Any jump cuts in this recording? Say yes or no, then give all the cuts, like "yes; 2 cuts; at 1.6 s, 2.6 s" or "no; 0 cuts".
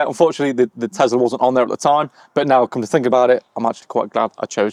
no; 0 cuts